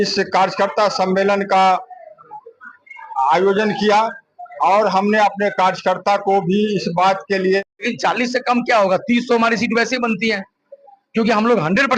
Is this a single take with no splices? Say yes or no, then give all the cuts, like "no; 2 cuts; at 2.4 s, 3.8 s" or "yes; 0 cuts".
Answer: no; 1 cut; at 7.8 s